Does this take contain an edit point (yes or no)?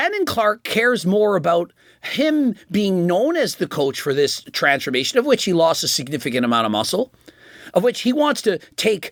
no